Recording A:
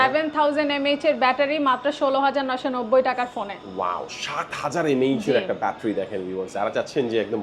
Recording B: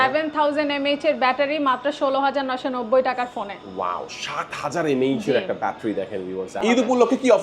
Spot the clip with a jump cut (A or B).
B